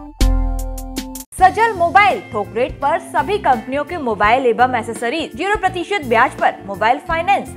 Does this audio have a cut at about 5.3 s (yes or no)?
yes